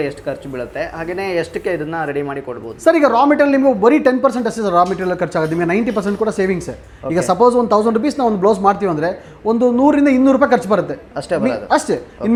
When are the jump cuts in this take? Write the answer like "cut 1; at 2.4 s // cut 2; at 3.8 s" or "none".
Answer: none